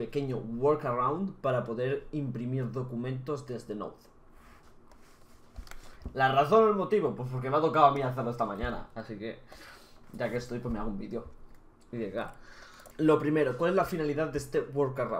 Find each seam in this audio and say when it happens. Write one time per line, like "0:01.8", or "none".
0:01.2

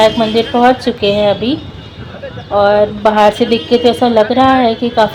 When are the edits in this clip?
none

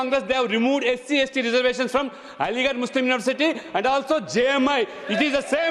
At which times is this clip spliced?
none

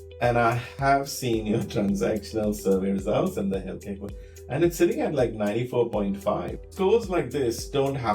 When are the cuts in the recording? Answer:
0:06.7

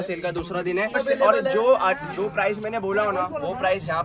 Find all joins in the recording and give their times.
0:01.0

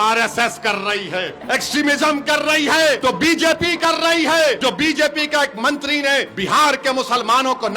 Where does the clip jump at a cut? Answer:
0:01.4
0:03.0
0:04.6
0:06.3

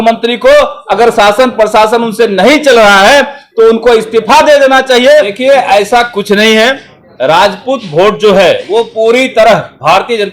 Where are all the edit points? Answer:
0:05.3

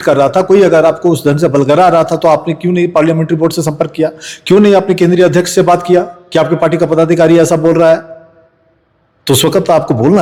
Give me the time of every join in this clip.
none

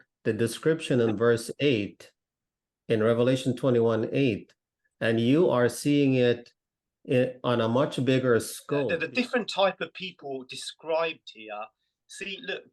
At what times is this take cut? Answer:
0:08.9

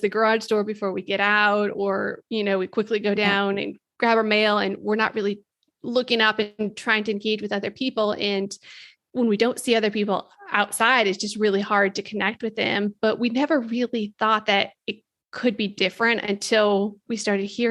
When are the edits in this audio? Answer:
none

